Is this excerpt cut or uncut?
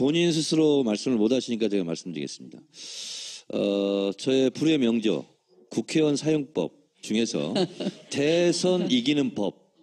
cut